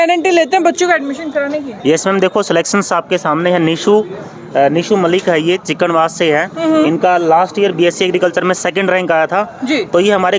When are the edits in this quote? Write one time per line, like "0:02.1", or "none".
none